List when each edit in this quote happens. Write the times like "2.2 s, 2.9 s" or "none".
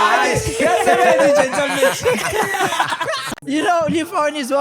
3.4 s